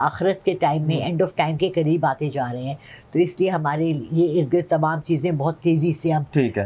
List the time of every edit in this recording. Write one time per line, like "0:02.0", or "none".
none

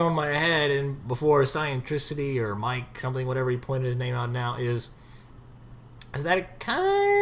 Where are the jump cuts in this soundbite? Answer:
none

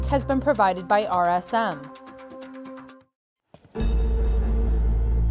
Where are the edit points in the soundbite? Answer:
0:01.8
0:02.9

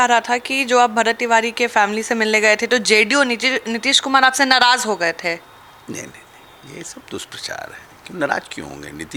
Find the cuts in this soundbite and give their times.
none

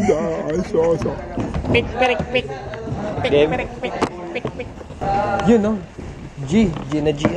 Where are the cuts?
none

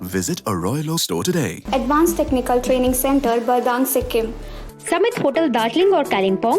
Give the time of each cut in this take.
0:01.6
0:04.5

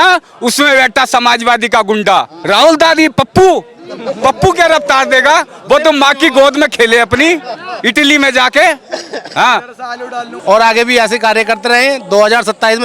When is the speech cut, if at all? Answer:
0:02.4
0:10.2

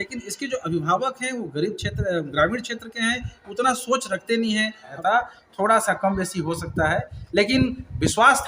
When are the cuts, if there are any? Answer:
0:04.9

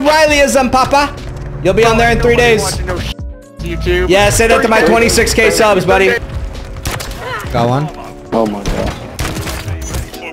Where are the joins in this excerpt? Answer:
0:06.2

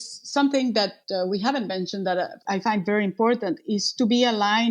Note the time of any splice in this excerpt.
0:01.0
0:02.4

